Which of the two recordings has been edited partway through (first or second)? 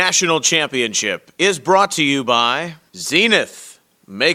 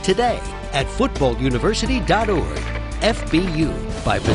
first